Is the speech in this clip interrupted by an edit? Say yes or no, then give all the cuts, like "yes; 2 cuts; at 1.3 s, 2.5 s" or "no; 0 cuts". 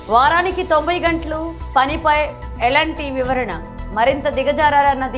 no; 0 cuts